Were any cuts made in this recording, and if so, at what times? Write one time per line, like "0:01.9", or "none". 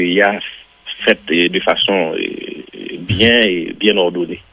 none